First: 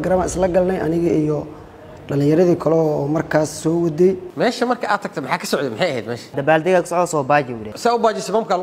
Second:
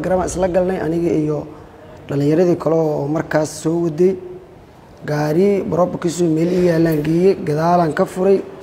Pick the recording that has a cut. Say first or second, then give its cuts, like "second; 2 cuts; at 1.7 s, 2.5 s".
first; 2 cuts; at 4.3 s, 6.3 s